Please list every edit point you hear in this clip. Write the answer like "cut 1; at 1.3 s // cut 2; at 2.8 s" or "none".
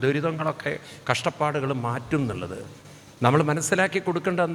none